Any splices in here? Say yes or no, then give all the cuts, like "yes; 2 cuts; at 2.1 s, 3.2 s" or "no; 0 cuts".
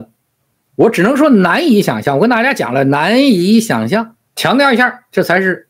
yes; 1 cut; at 4.4 s